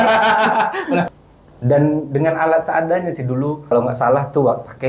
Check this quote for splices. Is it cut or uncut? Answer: cut